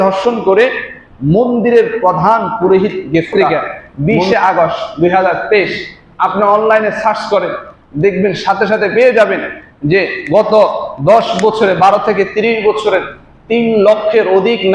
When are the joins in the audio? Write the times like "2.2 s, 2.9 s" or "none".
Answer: 3.3 s